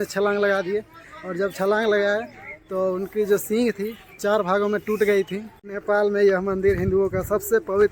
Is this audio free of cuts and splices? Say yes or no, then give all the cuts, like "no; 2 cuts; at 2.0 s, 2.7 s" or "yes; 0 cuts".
no; 1 cut; at 5.5 s